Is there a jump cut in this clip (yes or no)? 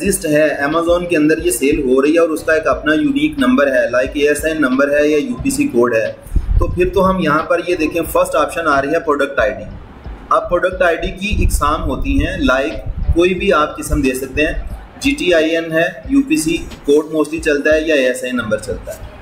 no